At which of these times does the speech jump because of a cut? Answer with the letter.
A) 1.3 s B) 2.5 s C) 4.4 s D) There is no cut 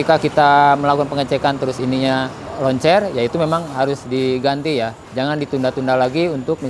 D